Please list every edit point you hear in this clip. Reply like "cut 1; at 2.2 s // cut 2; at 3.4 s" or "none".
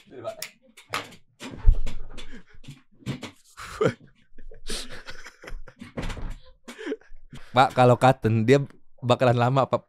cut 1; at 7.3 s

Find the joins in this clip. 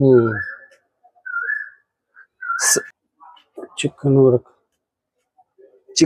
cut 1; at 2.9 s

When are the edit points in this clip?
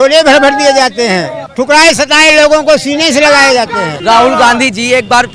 cut 1; at 3.9 s

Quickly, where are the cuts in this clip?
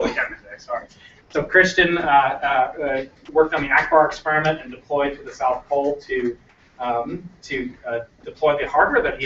cut 1; at 4.2 s

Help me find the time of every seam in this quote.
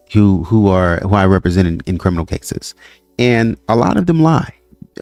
none

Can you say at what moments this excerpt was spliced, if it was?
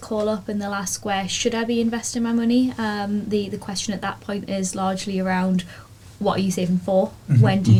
none

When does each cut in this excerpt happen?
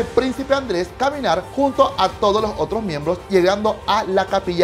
cut 1; at 1.5 s // cut 2; at 3.2 s

